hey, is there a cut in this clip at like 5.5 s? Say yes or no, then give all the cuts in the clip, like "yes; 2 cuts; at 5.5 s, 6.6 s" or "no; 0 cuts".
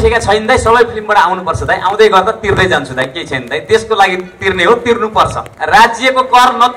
yes; 1 cut; at 5.5 s